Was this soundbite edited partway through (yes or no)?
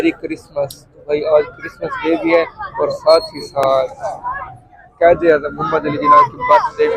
no